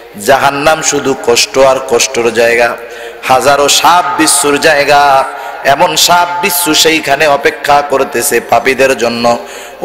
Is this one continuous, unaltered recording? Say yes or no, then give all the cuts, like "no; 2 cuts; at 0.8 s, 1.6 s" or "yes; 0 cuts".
yes; 0 cuts